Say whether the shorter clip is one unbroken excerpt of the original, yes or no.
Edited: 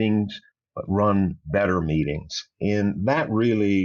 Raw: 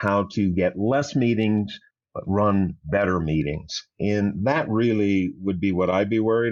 yes